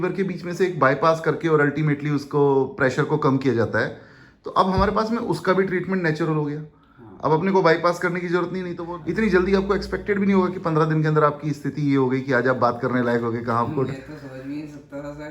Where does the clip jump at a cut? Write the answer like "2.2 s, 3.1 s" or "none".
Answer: 8.8 s

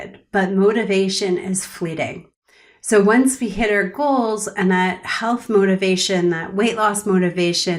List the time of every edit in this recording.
none

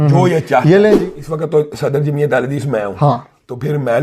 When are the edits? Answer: 1.0 s

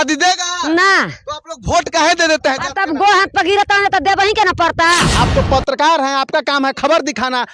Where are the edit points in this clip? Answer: 5.1 s

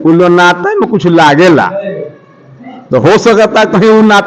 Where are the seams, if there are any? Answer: none

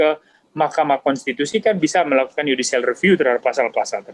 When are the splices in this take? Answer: none

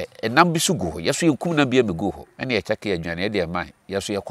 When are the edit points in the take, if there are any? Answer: 2.3 s

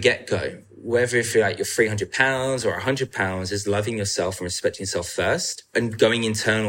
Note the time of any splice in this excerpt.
5.7 s

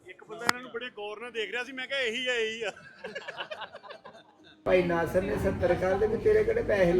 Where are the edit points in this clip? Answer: 4.5 s

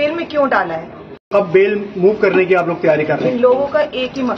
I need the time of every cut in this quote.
1.3 s

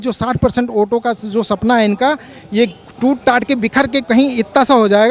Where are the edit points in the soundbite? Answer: none

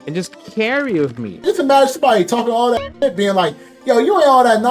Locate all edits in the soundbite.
1.4 s

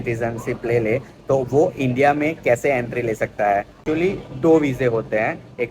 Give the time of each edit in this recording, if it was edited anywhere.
3.8 s

